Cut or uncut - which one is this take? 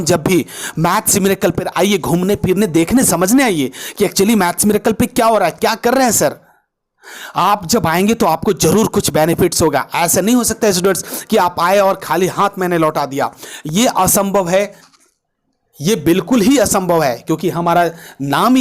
uncut